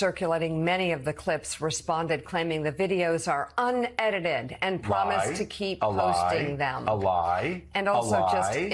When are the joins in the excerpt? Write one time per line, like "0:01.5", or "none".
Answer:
none